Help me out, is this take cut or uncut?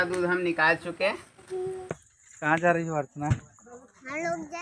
cut